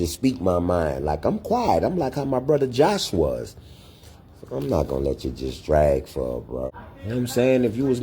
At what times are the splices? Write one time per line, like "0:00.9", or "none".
0:06.7